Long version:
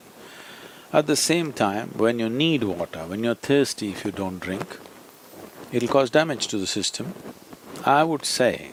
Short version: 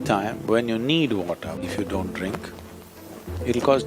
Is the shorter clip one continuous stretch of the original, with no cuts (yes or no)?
no